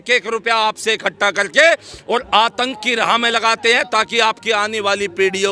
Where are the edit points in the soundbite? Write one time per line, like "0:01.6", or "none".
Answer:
none